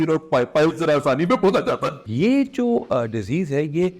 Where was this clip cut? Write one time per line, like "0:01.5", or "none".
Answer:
0:02.0